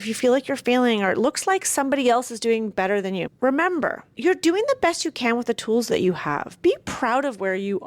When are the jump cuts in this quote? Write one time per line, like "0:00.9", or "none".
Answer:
0:03.3
0:04.1